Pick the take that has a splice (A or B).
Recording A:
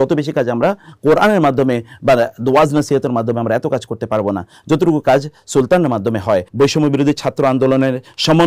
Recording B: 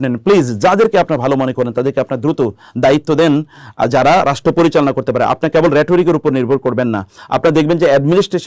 A